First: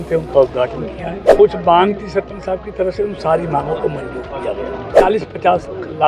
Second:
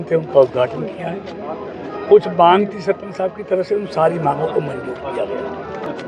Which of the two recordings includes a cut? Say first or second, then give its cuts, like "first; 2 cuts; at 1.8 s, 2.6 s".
first; 2 cuts; at 1.2 s, 4.9 s